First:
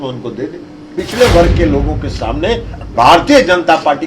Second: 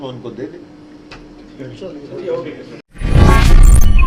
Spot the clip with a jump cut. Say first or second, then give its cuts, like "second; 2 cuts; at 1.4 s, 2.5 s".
first; 1 cut; at 1.0 s